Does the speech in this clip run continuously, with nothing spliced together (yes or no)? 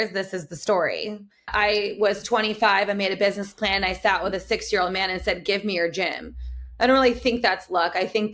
no